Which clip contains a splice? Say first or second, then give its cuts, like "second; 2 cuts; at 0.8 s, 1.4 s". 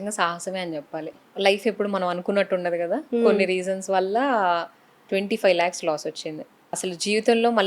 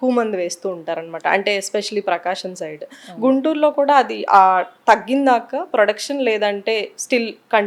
first; 3 cuts; at 1.2 s, 5.0 s, 6.8 s